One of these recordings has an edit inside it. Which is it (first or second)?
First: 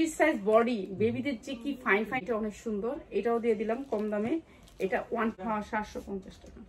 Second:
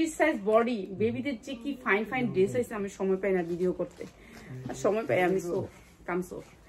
first